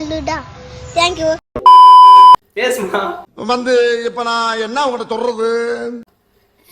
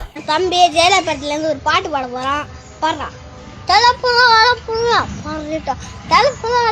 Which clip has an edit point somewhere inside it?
first; 1 cut; at 2.3 s

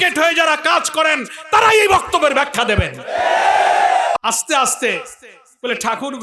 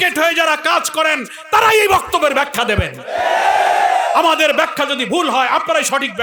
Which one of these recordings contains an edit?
first; 1 cut; at 4.1 s

